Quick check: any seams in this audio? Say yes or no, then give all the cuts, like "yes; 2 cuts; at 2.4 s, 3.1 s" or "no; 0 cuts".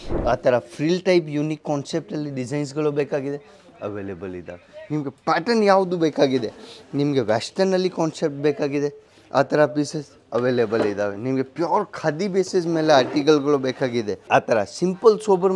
yes; 1 cut; at 14.2 s